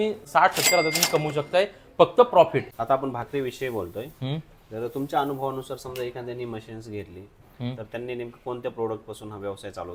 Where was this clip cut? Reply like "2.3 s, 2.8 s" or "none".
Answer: none